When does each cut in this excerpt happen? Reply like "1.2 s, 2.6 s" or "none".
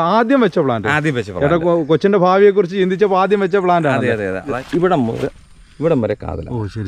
4.6 s